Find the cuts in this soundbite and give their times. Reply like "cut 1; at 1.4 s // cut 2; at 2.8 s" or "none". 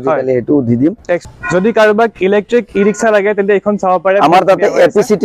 cut 1; at 1.2 s